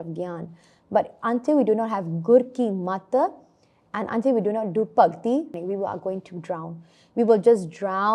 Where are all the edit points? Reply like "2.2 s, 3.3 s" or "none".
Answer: 5.5 s